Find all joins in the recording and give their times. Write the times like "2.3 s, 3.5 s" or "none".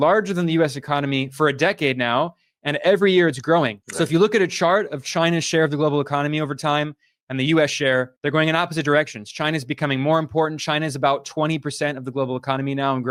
none